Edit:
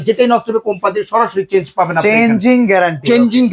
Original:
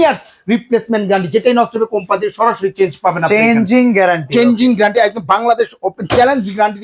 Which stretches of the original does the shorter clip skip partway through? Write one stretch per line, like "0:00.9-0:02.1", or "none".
none